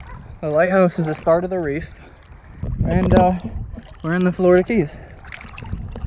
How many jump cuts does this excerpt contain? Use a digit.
1